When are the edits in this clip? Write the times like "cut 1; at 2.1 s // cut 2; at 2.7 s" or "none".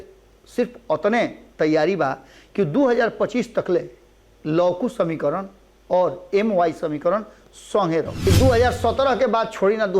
cut 1; at 8.3 s